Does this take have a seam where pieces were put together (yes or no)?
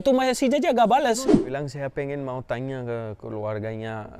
yes